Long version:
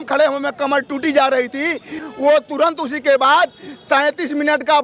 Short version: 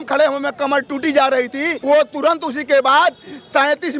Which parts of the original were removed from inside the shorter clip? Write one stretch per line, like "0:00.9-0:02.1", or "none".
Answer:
0:01.8-0:02.1